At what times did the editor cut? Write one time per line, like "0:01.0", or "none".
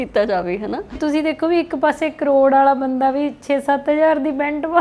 0:01.0